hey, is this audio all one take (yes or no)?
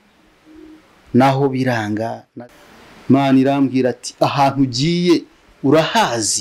no